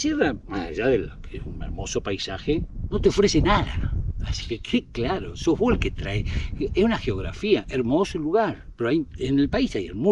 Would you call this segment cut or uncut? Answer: uncut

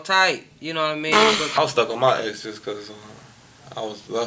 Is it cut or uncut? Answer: cut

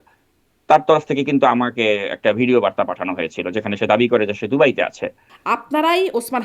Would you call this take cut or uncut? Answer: cut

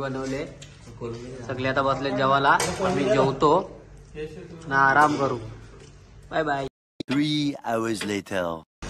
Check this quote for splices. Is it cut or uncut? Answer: uncut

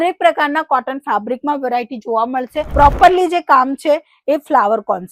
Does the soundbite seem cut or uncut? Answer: cut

